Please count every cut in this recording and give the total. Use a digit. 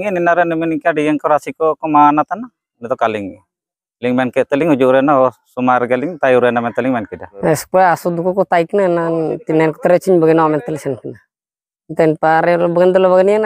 1